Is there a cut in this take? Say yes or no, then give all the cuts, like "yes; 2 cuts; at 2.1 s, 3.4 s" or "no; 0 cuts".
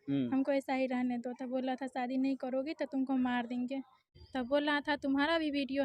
yes; 1 cut; at 4.0 s